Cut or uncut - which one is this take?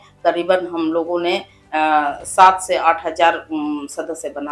uncut